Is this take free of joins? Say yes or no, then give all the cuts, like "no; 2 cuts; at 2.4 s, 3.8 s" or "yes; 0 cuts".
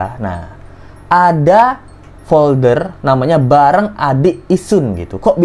yes; 0 cuts